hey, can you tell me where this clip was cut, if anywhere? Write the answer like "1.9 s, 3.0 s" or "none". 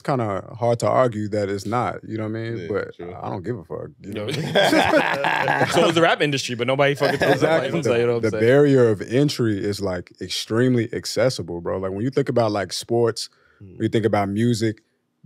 7.7 s